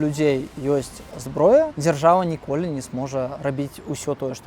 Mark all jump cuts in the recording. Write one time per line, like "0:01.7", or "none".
0:01.7
0:03.4